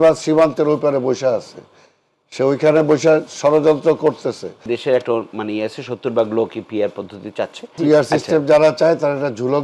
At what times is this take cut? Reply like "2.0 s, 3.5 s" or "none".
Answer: 4.7 s, 7.7 s